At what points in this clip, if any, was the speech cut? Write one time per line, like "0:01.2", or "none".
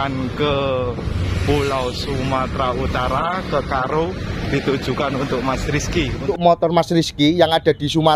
0:06.3